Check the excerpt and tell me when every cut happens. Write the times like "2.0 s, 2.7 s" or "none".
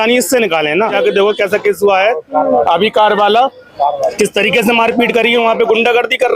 0.9 s